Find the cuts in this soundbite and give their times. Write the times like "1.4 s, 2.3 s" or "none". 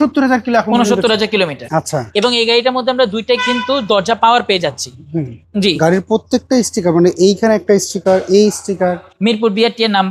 1.6 s, 5.4 s, 9.1 s